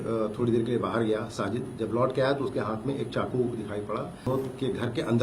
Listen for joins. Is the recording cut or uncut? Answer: cut